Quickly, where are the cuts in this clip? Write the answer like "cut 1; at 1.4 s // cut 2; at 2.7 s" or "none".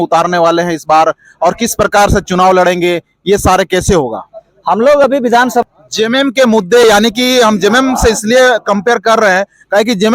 cut 1; at 5.6 s